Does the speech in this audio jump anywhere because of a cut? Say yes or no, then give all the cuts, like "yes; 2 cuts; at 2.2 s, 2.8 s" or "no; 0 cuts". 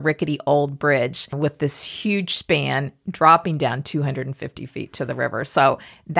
yes; 1 cut; at 1.3 s